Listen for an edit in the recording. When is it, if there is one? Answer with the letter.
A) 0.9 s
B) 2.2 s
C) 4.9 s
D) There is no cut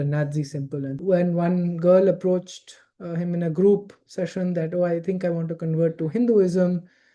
A